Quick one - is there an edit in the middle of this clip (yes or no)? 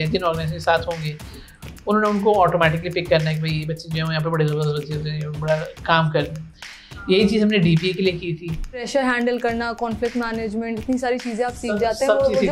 yes